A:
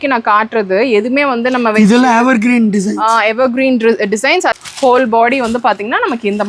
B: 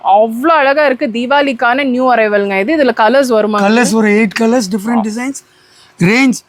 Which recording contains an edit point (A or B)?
A